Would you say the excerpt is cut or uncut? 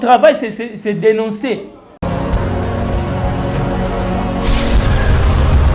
cut